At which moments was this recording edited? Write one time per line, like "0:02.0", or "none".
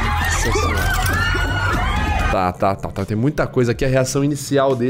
none